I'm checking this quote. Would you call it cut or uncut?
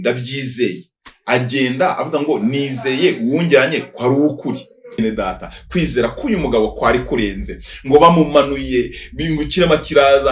cut